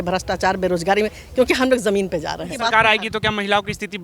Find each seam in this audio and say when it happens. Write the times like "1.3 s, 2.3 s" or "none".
2.5 s

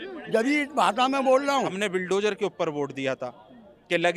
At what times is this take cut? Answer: 1.7 s

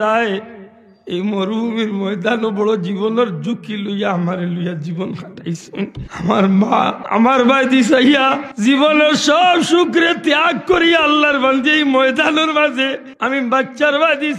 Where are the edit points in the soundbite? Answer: 6.0 s, 7.0 s, 8.5 s, 13.1 s

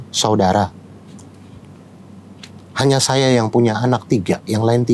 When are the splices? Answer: none

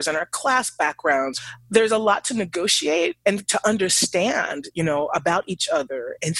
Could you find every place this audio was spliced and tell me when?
1.3 s

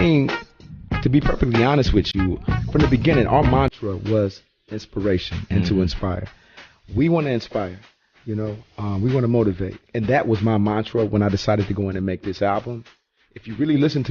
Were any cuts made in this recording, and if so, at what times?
6.4 s

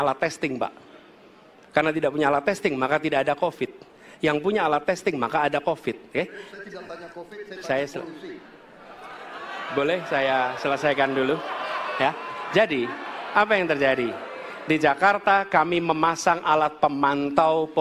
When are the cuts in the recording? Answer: none

